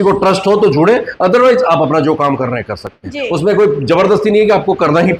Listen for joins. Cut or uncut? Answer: uncut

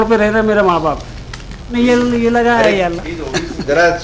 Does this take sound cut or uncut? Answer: cut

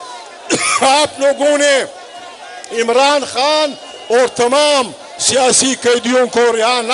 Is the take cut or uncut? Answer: uncut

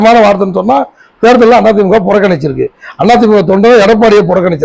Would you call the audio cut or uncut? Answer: uncut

